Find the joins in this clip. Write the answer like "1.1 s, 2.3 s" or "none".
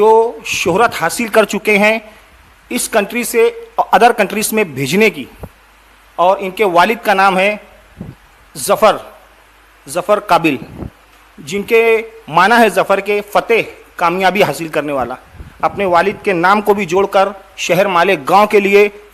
none